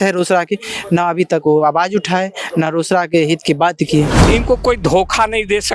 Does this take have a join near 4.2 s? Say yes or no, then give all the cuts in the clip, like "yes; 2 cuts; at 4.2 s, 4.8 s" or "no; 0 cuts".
yes; 1 cut; at 4.2 s